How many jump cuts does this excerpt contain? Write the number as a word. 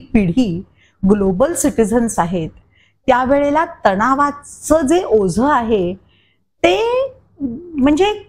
zero